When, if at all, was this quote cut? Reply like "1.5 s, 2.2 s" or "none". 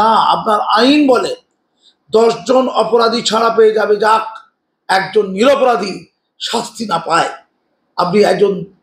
none